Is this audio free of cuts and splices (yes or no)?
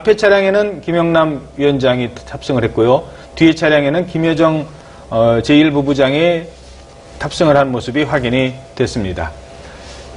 no